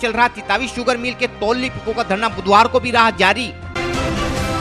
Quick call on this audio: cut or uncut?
cut